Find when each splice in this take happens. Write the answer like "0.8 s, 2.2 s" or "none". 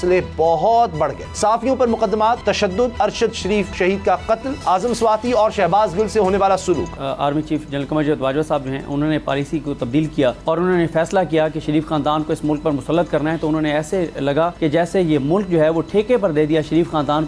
1.2 s, 2.7 s, 3.7 s, 4.5 s, 7.0 s, 10.4 s, 14.5 s